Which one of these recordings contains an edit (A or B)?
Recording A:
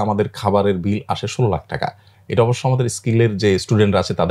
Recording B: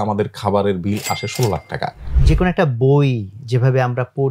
B